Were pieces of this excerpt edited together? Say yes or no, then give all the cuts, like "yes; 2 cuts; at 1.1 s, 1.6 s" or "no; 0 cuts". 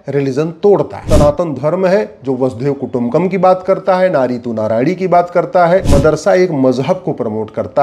yes; 2 cuts; at 1.0 s, 5.9 s